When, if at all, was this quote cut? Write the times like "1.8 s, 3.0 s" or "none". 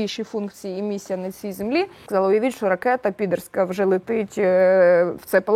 2.0 s